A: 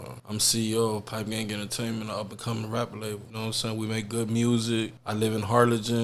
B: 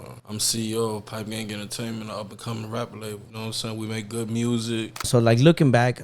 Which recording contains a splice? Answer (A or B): B